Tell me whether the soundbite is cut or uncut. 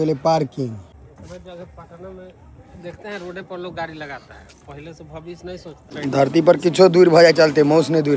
cut